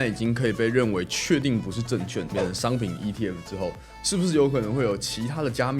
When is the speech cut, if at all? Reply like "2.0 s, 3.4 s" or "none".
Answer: 2.3 s